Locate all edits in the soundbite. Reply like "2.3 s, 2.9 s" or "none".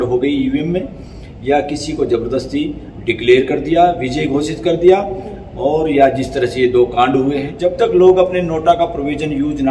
7.5 s

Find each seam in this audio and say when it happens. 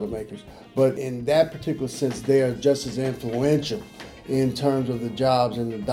1.0 s

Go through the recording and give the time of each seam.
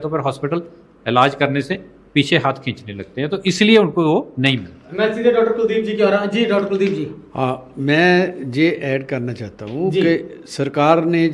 none

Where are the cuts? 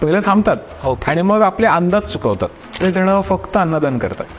2.8 s

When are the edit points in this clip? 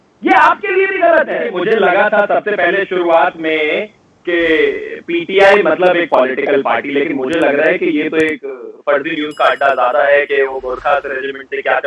1.6 s

